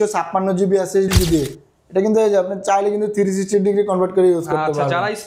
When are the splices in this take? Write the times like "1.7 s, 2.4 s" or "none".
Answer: 1.1 s